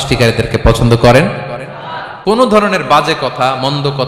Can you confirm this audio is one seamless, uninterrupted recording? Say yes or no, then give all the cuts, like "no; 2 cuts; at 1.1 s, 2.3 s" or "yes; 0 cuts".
no; 1 cut; at 2.3 s